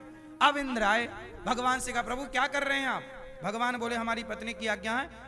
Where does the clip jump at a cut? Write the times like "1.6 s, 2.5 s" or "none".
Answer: none